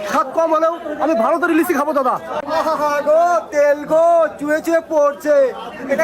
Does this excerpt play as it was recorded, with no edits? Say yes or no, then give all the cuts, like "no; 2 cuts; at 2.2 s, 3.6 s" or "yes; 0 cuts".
no; 1 cut; at 2.4 s